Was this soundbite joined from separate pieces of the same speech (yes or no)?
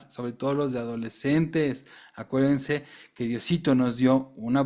no